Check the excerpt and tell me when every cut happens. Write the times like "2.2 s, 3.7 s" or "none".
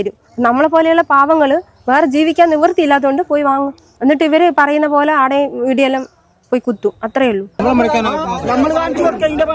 7.6 s